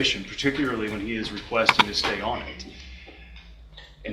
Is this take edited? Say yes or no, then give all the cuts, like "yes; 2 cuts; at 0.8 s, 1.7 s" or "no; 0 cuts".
no; 0 cuts